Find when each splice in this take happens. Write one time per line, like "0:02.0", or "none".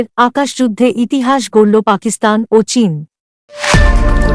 0:03.3

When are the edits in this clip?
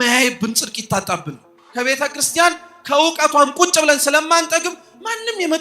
0:01.6

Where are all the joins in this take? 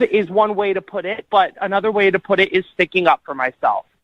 none

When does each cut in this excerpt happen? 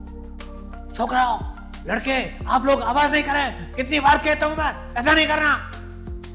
0:01.0

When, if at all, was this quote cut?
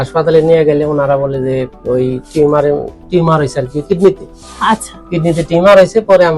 none

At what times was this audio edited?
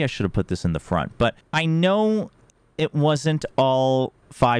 0:01.4

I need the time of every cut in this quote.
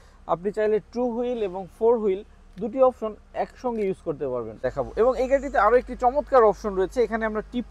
0:04.5

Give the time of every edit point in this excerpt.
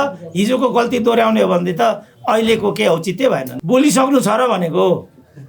0:03.5

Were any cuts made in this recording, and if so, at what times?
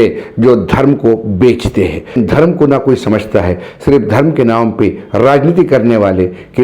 0:02.2

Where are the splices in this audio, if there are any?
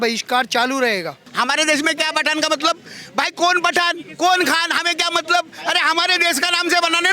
0:01.2

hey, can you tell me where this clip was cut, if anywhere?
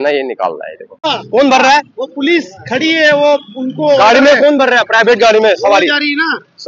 0:01.1

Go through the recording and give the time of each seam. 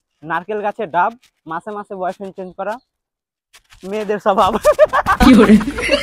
0:04.9

